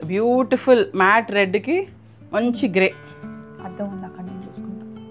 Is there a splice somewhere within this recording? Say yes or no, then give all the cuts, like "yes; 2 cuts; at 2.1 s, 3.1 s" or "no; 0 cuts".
no; 0 cuts